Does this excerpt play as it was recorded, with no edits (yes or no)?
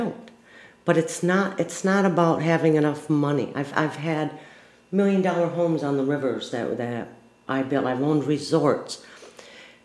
yes